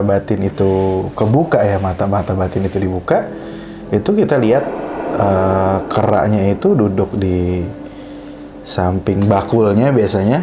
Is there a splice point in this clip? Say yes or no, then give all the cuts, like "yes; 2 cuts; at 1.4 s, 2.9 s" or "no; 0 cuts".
no; 0 cuts